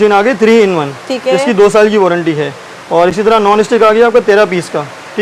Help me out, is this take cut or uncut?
uncut